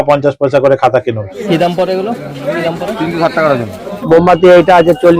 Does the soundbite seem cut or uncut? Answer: cut